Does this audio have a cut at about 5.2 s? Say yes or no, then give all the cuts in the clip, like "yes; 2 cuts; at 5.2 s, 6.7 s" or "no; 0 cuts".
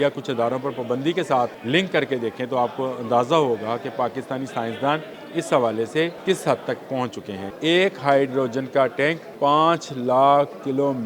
yes; 5 cuts; at 1.6 s, 5.2 s, 6.2 s, 7.4 s, 9.3 s